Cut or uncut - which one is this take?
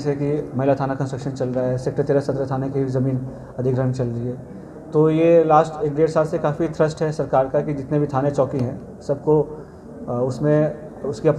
uncut